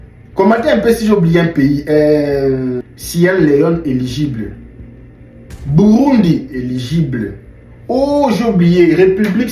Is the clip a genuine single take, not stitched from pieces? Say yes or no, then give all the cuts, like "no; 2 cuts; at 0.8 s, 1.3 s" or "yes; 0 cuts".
no; 1 cut; at 2.9 s